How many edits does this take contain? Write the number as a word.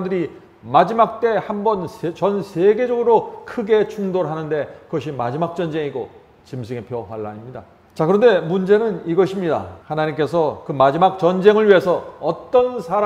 two